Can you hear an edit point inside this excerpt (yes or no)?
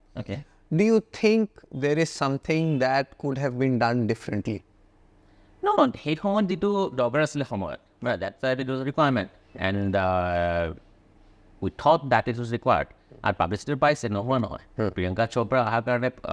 no